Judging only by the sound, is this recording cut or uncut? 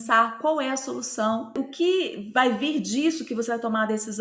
cut